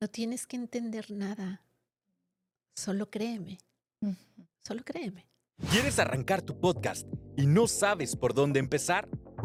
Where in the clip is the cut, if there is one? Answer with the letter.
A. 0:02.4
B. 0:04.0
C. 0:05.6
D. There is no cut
D